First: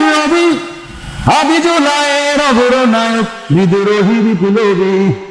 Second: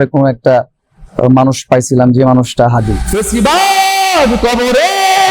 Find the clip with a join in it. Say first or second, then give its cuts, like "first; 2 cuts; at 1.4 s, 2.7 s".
second; 1 cut; at 3.0 s